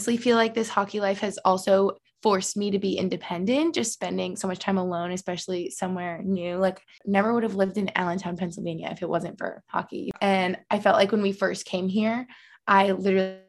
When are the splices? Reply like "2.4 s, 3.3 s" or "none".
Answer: 7.0 s, 10.1 s